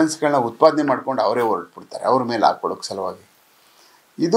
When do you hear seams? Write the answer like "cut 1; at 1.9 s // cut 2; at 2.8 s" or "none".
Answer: none